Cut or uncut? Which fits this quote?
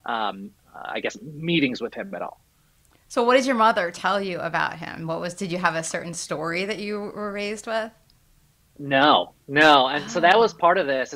uncut